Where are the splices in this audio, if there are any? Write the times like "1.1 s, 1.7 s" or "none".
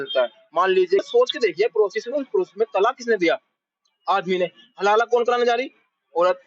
1.0 s